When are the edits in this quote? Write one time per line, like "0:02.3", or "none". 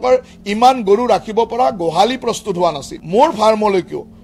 0:02.9